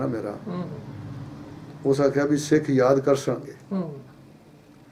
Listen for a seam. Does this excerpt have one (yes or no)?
no